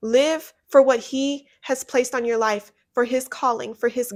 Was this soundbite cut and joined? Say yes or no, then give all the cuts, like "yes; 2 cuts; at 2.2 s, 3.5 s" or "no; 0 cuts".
no; 0 cuts